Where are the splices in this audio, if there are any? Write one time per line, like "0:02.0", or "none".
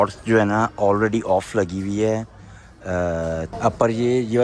0:03.5